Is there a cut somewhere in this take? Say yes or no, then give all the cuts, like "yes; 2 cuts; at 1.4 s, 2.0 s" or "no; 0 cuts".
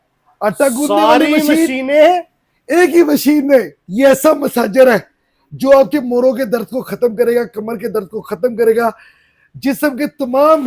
yes; 1 cut; at 3.8 s